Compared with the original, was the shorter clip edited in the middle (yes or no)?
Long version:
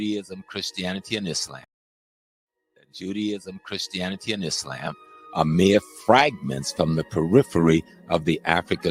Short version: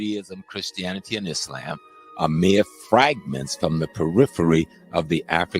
yes